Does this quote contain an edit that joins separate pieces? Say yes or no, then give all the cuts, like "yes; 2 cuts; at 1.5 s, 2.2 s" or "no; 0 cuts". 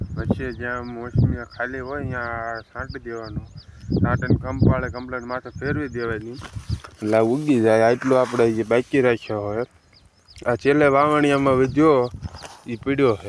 no; 0 cuts